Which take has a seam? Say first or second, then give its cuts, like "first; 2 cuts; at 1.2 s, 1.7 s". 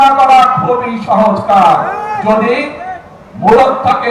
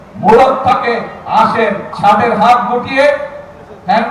second; 1 cut; at 1.9 s